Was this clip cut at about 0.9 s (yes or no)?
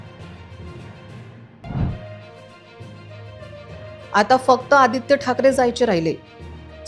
yes